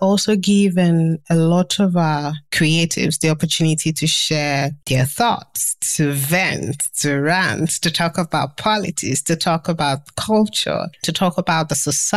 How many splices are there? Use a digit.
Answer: 0